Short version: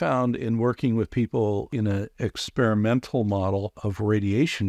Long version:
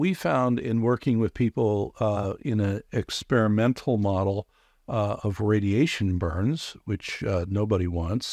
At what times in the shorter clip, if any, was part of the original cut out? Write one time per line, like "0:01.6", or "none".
0:01.7
0:03.8